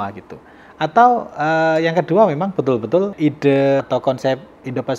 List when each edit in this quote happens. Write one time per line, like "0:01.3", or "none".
0:03.1
0:03.8